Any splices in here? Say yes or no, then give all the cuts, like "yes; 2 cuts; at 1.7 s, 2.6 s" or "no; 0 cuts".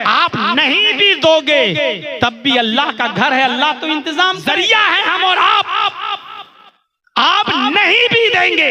yes; 1 cut; at 4.5 s